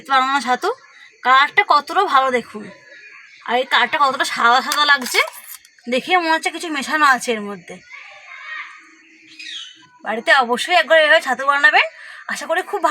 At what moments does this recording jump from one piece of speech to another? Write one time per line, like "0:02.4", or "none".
none